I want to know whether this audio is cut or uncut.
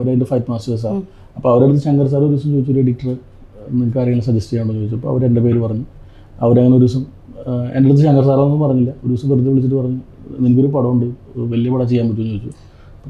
uncut